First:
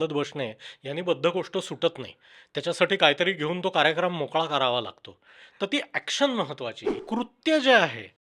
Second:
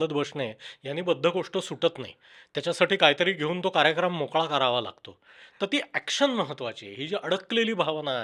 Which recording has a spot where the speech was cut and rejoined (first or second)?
first